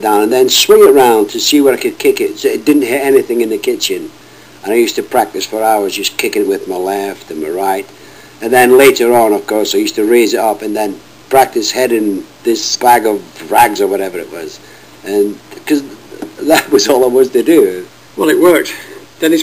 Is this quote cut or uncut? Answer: cut